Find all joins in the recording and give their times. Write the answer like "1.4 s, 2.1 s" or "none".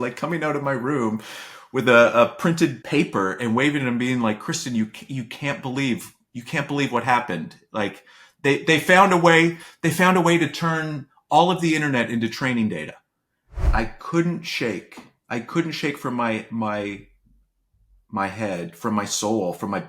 13.6 s